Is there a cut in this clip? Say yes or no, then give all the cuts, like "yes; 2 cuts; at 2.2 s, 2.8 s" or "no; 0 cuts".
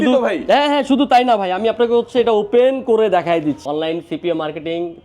yes; 1 cut; at 3.6 s